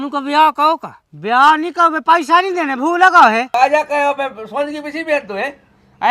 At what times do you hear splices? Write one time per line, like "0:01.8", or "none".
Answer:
0:03.5